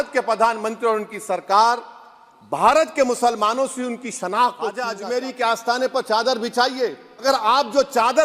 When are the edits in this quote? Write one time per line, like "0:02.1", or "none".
0:04.9
0:07.2